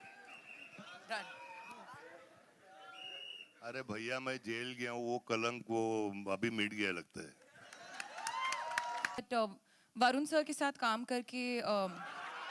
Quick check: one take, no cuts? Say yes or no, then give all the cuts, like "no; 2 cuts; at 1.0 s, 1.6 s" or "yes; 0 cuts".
no; 1 cut; at 9.2 s